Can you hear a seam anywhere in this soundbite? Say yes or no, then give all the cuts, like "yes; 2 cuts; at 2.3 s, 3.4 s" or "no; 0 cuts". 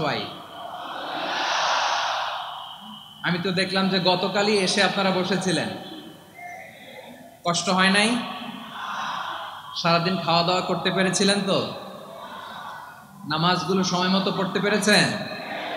no; 0 cuts